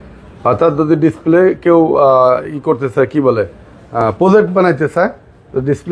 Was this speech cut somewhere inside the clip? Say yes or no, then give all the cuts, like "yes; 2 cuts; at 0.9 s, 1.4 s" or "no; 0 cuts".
no; 0 cuts